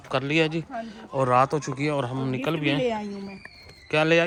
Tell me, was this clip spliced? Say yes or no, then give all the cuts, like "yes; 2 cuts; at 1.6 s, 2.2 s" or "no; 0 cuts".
no; 0 cuts